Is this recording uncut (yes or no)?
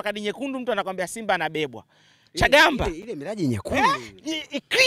yes